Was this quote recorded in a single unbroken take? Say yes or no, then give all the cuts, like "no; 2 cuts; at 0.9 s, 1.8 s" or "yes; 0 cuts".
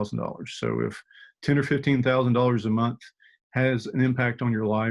yes; 0 cuts